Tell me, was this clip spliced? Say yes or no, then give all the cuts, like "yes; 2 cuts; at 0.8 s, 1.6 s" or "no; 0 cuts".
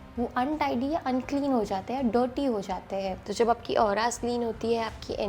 yes; 1 cut; at 3.2 s